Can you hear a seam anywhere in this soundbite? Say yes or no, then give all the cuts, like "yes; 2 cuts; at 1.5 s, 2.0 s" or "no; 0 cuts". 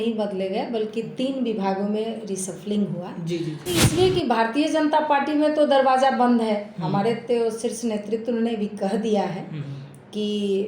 yes; 1 cut; at 3.6 s